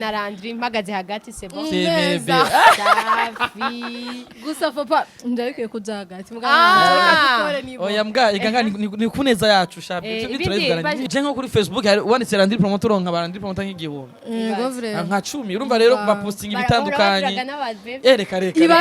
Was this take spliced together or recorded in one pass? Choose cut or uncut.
cut